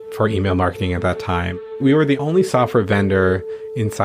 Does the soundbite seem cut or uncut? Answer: cut